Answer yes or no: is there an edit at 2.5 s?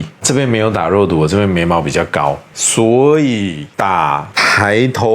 yes